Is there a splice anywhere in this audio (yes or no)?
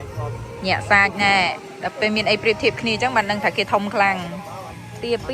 no